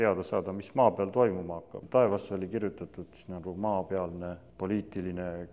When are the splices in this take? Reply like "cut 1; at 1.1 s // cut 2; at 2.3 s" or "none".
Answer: cut 1; at 1.8 s // cut 2; at 4.4 s